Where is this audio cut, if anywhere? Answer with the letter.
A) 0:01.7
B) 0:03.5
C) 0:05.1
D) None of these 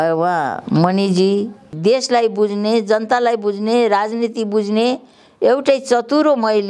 A